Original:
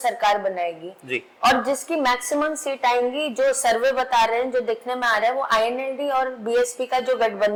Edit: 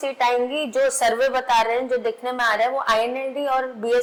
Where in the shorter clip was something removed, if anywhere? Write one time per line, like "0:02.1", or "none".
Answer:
none